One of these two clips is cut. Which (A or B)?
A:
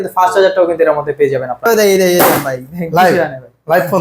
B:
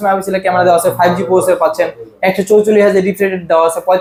A